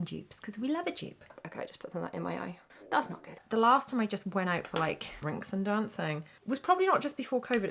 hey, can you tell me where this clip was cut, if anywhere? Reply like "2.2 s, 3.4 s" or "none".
1.3 s, 3.4 s, 5.1 s, 6.4 s